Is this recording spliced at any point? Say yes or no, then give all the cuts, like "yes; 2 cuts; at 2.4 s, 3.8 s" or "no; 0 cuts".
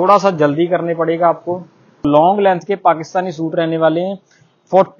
yes; 1 cut; at 2.0 s